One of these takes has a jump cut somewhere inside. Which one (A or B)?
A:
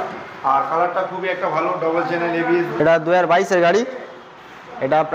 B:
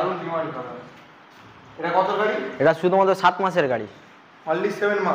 A